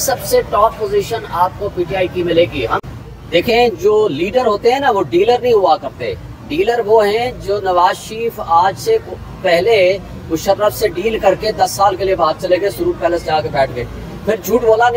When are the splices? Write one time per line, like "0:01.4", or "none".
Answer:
0:02.8